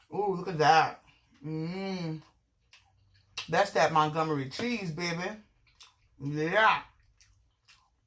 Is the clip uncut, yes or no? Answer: yes